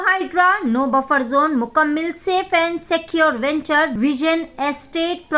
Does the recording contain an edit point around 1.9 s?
no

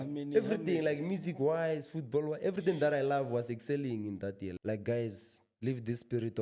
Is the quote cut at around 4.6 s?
yes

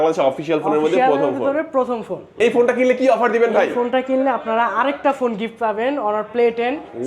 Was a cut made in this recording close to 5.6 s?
no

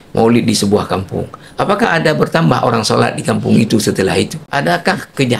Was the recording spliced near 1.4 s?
no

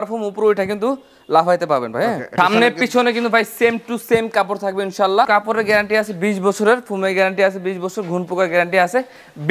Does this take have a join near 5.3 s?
yes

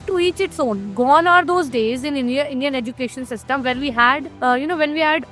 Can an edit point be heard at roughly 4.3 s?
yes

